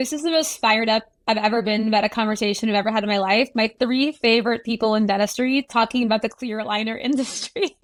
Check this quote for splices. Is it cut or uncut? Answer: uncut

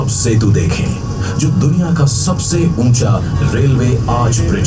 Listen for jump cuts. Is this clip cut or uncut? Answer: uncut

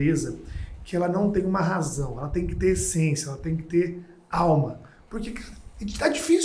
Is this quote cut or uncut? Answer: uncut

